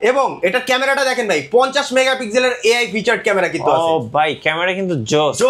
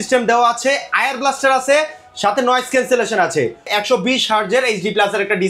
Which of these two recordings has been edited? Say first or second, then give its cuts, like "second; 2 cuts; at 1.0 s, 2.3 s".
second; 1 cut; at 3.7 s